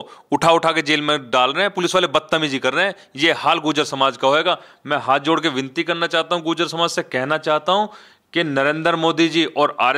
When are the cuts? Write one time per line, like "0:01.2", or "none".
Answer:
none